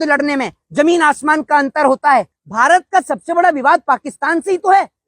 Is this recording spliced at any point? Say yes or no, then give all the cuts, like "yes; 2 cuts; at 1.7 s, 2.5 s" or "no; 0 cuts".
yes; 1 cut; at 2.4 s